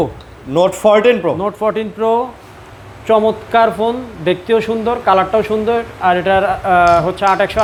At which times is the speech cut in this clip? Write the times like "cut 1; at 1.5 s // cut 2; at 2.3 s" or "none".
none